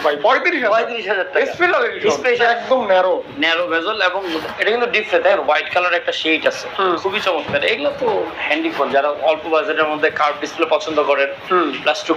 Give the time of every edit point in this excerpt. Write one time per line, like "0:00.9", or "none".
0:02.4
0:07.0